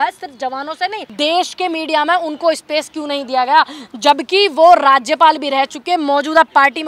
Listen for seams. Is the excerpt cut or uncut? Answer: cut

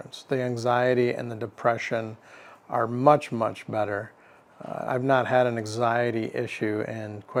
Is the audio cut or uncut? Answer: uncut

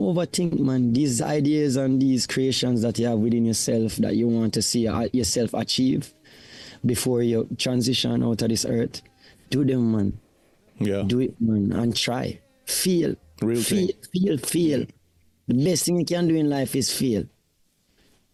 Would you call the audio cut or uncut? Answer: uncut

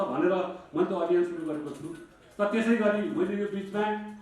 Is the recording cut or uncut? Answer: uncut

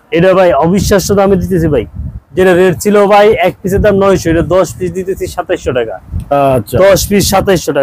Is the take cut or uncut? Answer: uncut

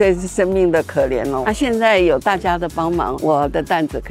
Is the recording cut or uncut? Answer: cut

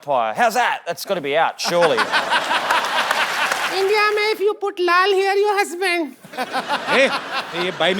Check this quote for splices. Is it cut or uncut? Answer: cut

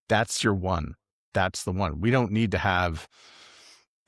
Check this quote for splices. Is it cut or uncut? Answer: uncut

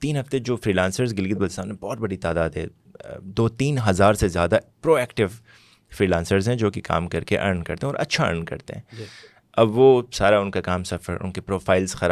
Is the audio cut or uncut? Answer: uncut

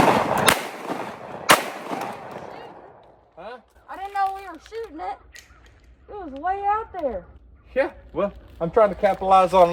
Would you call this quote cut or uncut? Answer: uncut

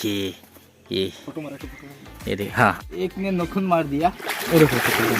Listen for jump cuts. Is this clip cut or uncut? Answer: cut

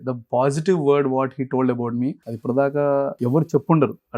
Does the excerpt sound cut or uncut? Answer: cut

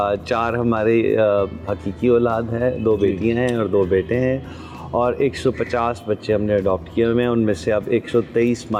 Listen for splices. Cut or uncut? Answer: uncut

